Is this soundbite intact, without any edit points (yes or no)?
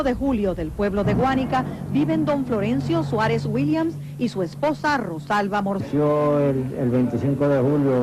yes